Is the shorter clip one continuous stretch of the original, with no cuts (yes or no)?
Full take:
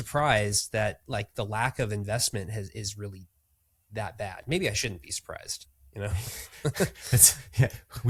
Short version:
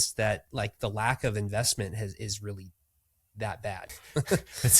no